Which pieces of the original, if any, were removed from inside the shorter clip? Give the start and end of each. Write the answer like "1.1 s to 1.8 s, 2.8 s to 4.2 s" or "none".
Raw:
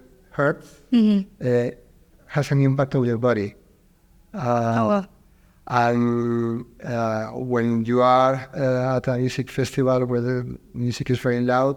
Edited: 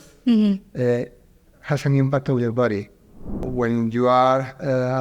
4.1 s to 7.3 s